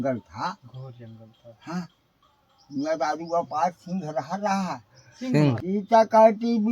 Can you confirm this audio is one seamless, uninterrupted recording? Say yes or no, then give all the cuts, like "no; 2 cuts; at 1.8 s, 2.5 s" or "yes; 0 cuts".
no; 1 cut; at 5.6 s